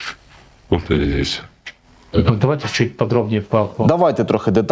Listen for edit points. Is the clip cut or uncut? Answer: uncut